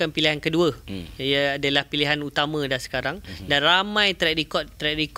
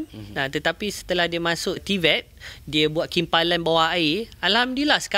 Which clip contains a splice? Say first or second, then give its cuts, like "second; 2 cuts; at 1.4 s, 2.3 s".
second; 1 cut; at 1.8 s